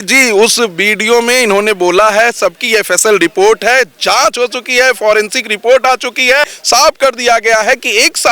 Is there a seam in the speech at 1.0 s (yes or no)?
no